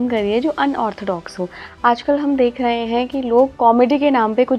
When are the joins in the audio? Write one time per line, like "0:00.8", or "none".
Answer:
none